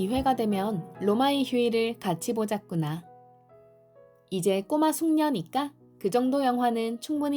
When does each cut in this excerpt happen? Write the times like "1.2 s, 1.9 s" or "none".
none